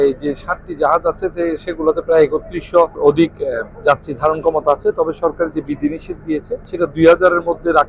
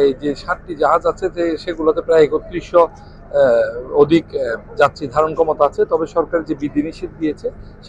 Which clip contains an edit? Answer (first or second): first